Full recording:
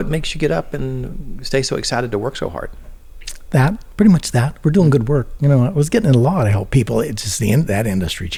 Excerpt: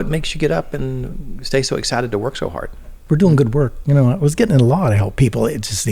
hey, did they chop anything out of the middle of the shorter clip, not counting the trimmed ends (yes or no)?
yes